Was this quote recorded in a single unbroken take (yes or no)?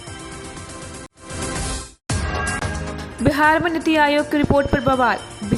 no